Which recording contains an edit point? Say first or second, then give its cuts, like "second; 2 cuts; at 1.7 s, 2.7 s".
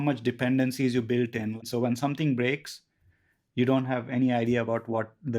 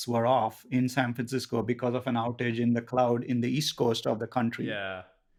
first; 1 cut; at 1.6 s